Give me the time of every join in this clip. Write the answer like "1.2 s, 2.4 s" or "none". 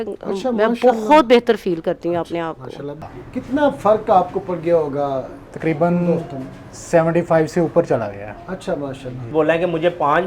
3.0 s, 9.3 s